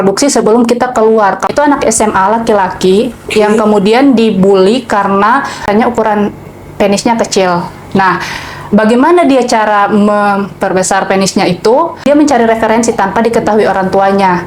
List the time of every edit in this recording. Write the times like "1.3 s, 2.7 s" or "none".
1.5 s, 5.6 s, 12.1 s